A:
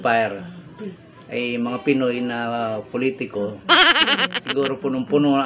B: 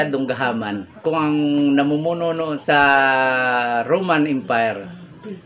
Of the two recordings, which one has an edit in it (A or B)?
B